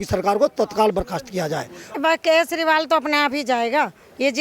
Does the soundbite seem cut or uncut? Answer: cut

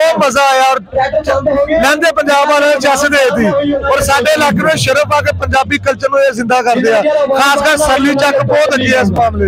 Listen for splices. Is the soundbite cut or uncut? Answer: uncut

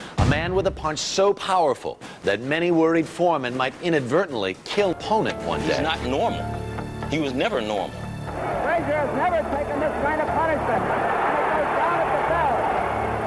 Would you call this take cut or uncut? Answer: uncut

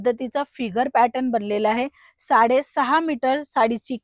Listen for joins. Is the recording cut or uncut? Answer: uncut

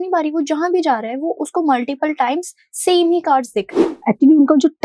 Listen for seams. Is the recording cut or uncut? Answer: cut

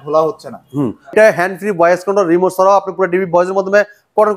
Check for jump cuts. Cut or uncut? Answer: cut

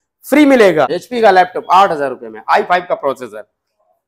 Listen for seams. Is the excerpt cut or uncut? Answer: cut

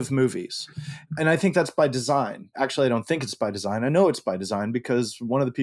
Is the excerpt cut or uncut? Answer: cut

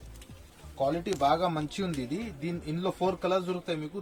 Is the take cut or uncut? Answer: uncut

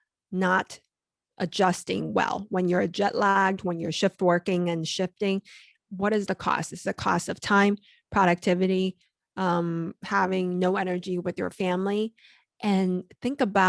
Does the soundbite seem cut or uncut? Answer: cut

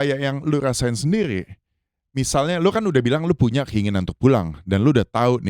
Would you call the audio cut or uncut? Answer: uncut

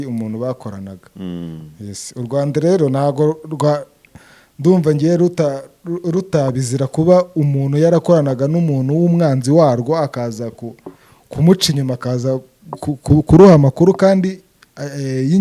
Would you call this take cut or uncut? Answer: uncut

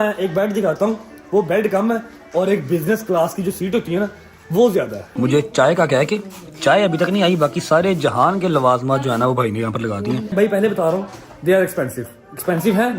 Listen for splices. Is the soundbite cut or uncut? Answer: cut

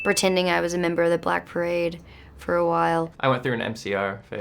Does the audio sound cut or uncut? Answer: cut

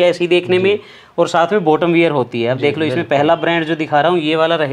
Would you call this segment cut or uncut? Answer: uncut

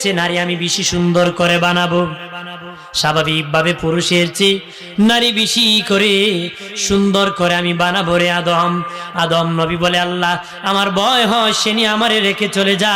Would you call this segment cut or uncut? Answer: uncut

